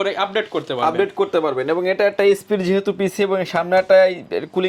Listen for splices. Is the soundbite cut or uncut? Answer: uncut